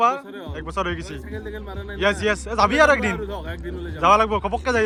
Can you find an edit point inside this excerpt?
no; 0 cuts

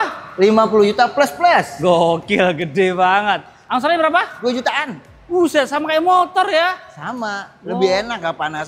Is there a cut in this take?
yes; 1 cut; at 3.6 s

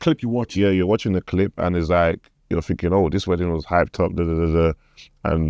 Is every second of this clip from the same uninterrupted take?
yes; 0 cuts

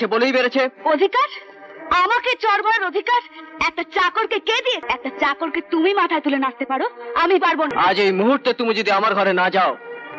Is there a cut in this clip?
yes; 2 cuts; at 4.9 s, 7.7 s

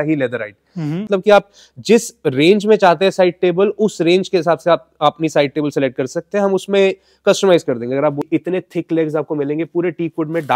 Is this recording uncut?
no; 2 cuts; at 1.1 s, 8.3 s

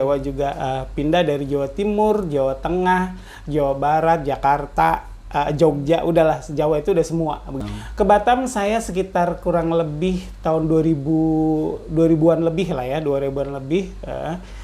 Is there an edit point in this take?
yes; 1 cut; at 7.5 s

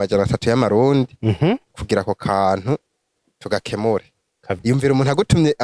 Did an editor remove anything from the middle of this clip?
yes; 1 cut; at 4.6 s

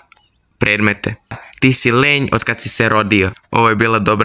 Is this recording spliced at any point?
yes; 2 cuts; at 1.3 s, 3.4 s

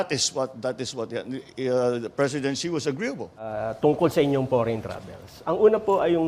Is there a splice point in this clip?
yes; 1 cut; at 3.5 s

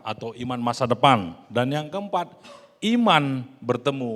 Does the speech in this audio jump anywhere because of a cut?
no; 0 cuts

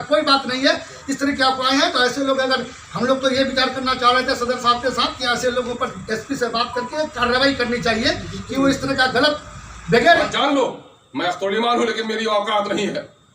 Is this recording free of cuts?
no; 1 cut; at 10.3 s

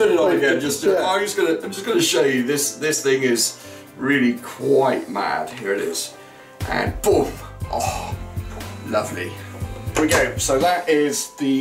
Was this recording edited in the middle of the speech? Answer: yes; 1 cut; at 10.0 s

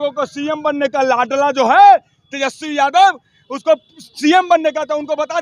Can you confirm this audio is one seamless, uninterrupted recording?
yes; 0 cuts

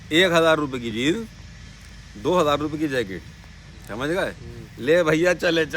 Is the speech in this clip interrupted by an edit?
no; 0 cuts

